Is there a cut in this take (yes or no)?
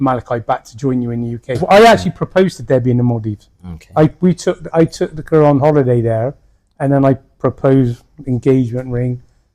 yes